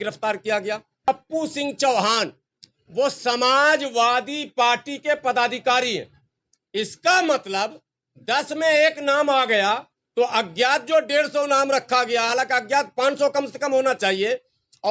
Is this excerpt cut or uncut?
cut